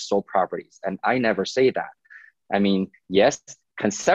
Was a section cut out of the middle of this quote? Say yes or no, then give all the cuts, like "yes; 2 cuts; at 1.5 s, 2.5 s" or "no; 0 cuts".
no; 0 cuts